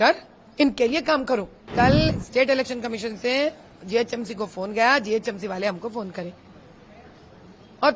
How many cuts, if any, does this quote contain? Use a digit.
1